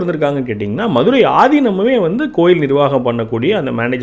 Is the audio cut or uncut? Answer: uncut